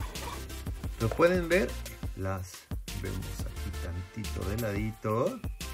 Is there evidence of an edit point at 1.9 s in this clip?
yes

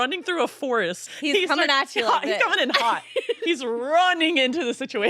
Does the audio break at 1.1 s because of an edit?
yes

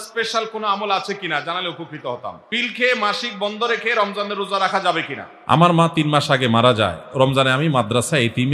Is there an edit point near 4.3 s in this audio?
no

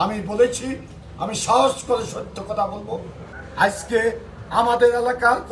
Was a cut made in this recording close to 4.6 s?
no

